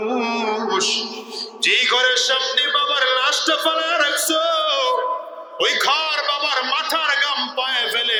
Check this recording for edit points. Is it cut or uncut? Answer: uncut